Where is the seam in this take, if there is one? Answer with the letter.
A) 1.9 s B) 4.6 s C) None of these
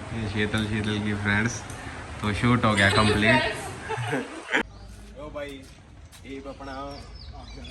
B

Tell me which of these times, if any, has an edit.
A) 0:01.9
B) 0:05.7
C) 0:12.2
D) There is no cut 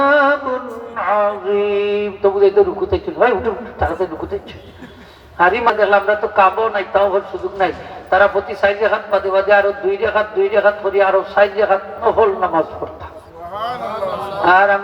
B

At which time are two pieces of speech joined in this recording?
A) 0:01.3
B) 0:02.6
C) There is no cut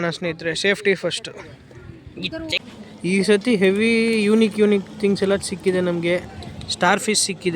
B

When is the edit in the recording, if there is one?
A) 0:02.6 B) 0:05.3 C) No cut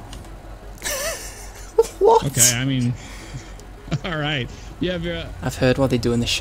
B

